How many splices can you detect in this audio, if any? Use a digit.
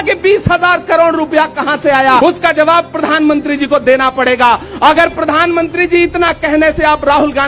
1